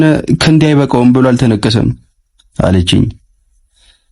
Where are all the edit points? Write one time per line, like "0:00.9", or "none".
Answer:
none